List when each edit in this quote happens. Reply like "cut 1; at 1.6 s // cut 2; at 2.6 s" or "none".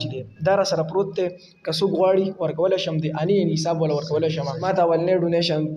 cut 1; at 4.5 s